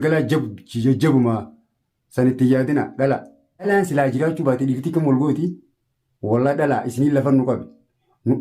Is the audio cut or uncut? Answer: cut